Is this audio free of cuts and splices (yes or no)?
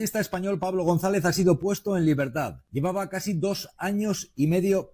no